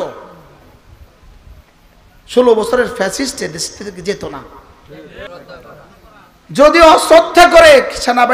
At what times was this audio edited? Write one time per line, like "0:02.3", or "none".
0:05.3